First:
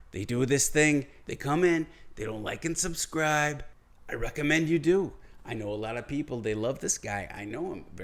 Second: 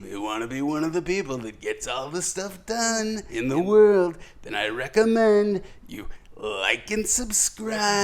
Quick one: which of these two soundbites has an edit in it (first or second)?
second